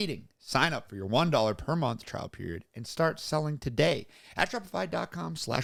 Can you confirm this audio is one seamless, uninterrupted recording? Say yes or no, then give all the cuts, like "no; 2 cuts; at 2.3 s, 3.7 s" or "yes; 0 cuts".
yes; 0 cuts